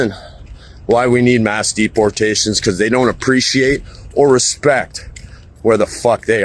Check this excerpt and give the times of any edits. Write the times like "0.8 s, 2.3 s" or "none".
none